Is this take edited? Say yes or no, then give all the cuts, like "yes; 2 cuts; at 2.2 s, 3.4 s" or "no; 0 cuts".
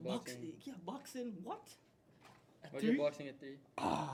no; 0 cuts